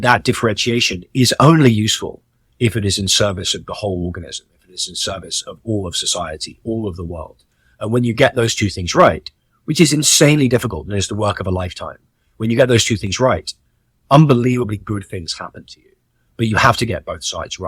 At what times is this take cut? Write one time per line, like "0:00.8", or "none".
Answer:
none